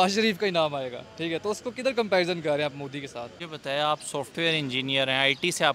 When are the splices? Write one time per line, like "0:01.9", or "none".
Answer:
0:03.4